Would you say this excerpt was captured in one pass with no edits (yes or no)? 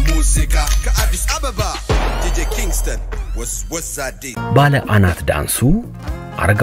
no